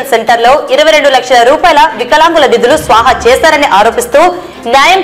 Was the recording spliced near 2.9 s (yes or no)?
no